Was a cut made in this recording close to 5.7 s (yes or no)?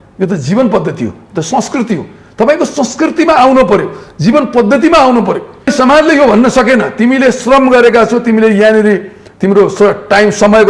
yes